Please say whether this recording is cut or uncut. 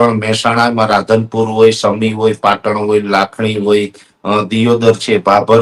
uncut